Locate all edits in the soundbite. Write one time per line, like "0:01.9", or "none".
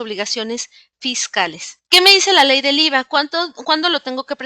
0:01.7